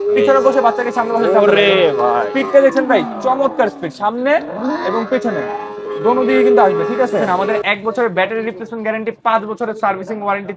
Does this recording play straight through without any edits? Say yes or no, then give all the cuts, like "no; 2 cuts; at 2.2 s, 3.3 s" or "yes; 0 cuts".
no; 1 cut; at 7.2 s